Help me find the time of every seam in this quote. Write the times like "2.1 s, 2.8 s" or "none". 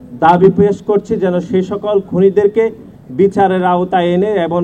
none